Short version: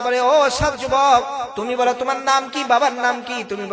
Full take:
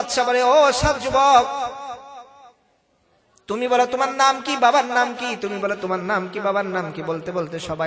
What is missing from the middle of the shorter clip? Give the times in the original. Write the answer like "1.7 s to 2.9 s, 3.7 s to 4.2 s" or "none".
1.7 s to 3.4 s